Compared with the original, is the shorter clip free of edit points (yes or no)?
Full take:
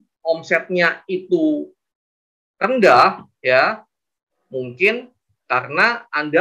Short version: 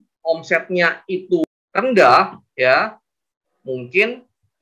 no